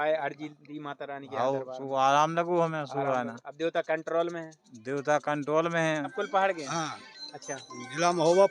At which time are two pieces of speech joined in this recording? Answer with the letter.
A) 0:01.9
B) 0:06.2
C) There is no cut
B